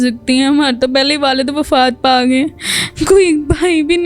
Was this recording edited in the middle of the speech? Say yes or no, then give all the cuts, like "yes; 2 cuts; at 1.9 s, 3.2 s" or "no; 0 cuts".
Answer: no; 0 cuts